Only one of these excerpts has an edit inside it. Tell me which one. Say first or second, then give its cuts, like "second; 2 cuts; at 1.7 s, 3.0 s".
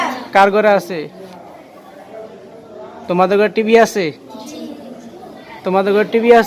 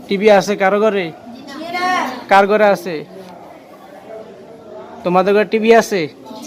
first; 1 cut; at 5.4 s